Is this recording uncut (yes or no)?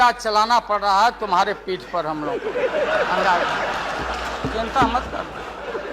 yes